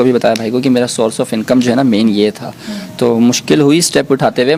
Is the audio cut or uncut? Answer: uncut